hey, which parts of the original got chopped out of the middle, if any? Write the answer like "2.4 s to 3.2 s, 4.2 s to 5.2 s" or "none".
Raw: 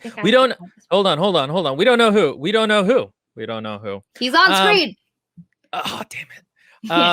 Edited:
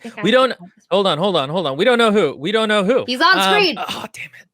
3.1 s to 4.2 s, 4.9 s to 5.8 s